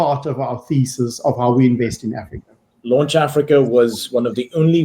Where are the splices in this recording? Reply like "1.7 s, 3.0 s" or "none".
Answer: 2.8 s